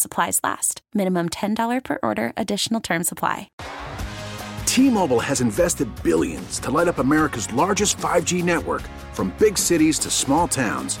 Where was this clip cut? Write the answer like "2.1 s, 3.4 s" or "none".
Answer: 3.6 s